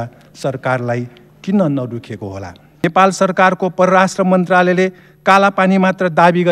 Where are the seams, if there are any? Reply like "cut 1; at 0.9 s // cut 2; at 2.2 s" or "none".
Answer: cut 1; at 2.8 s